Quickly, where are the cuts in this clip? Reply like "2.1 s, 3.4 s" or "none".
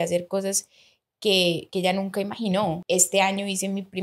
2.8 s